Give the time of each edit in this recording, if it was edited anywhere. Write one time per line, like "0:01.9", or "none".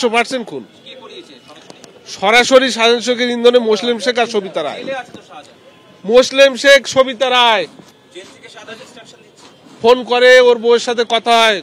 none